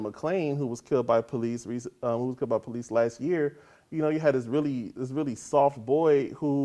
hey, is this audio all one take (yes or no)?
yes